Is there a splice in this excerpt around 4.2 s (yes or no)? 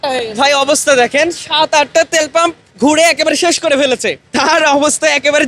yes